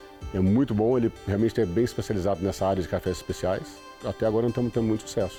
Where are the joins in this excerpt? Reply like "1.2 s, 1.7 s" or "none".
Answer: none